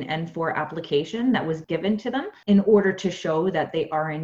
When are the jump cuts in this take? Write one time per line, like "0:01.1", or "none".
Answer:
0:02.3